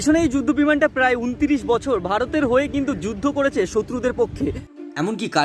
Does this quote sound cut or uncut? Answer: uncut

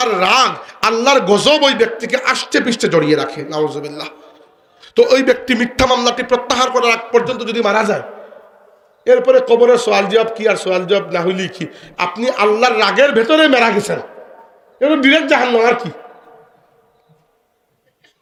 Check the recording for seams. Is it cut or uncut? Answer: uncut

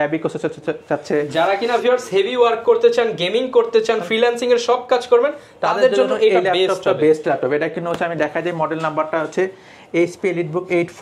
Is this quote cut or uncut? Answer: uncut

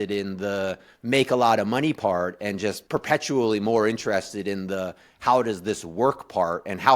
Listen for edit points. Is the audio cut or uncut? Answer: cut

